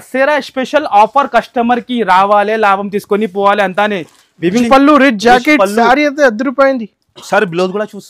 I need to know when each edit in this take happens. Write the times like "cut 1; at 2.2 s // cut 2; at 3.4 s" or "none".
cut 1; at 4.6 s